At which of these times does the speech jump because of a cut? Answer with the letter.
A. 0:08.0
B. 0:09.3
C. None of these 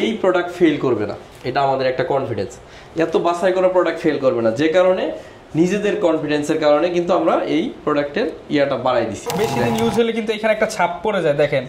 B